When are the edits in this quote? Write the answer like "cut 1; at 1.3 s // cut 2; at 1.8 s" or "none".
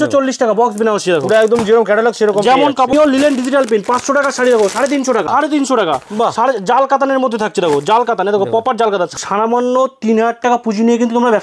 cut 1; at 2.9 s // cut 2; at 5.3 s // cut 3; at 9.1 s

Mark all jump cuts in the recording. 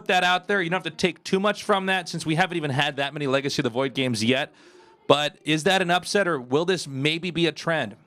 cut 1; at 1.2 s

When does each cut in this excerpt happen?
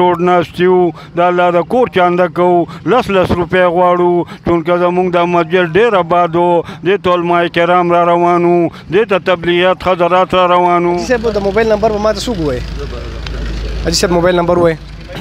cut 1; at 11.0 s

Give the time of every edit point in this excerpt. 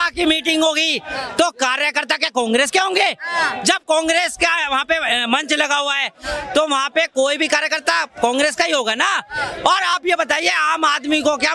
none

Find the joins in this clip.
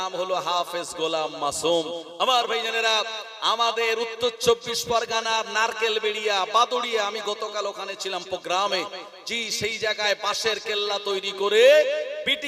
none

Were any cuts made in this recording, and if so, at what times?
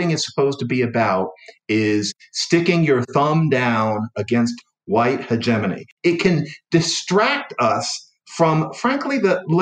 cut 1; at 5.9 s

